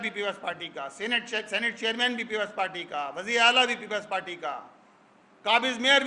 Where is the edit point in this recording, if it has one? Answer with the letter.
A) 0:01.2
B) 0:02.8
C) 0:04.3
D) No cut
D